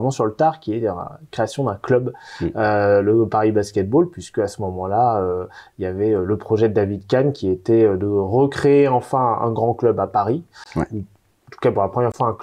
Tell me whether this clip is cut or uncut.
uncut